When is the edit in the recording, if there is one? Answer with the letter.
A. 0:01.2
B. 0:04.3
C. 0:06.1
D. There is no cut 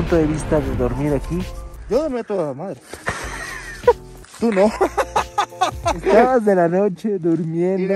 C